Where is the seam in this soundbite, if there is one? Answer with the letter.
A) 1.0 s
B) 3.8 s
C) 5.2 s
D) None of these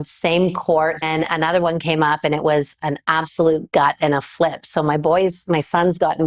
A